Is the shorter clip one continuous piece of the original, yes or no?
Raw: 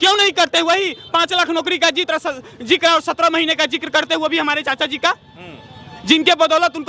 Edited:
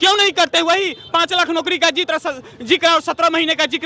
yes